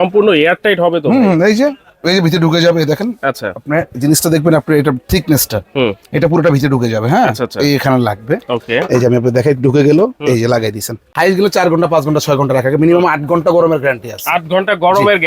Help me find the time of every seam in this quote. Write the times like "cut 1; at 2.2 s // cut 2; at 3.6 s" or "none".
cut 1; at 11.0 s